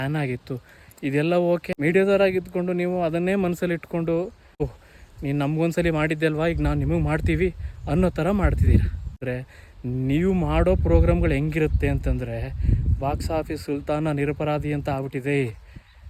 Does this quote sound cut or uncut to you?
cut